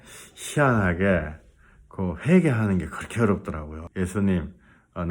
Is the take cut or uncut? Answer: cut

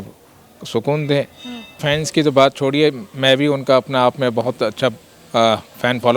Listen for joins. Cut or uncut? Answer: cut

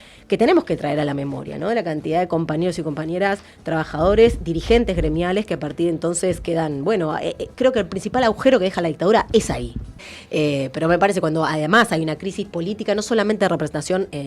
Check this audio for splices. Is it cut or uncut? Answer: cut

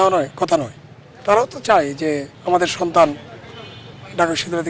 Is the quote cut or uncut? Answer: cut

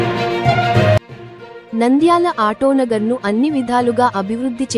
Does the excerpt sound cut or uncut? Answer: cut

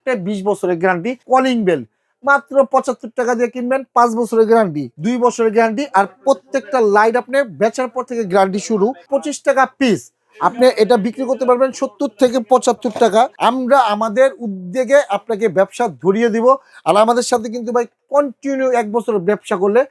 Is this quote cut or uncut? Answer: cut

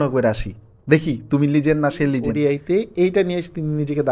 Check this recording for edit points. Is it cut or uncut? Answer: cut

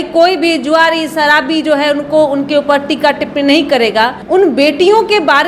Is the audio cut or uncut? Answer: cut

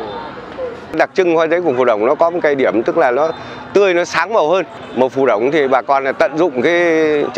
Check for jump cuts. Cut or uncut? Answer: cut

